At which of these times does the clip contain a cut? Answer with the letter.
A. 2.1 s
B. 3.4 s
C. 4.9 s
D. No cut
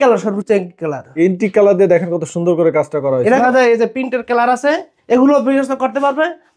B